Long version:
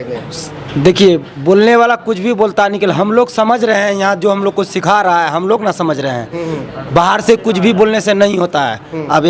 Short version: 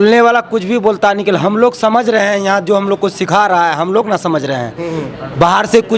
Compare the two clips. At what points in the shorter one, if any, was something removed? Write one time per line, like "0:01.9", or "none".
none